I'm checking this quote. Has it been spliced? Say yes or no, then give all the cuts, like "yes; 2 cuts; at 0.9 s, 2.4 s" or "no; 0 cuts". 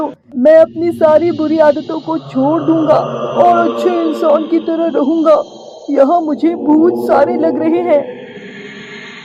no; 0 cuts